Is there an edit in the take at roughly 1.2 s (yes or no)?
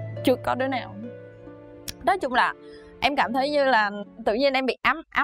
no